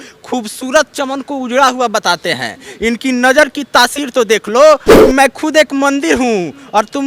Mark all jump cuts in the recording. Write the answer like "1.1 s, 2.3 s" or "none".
4.9 s